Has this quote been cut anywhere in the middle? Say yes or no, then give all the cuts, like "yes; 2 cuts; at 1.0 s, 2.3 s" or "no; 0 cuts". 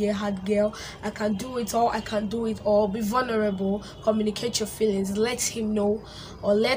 no; 0 cuts